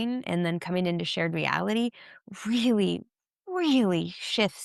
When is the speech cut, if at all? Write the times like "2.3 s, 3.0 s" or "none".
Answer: none